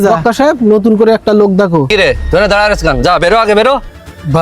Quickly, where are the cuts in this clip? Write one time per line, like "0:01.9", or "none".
0:01.9